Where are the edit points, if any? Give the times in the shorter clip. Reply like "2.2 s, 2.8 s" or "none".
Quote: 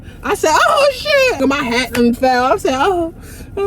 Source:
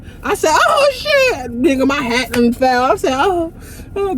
1.4 s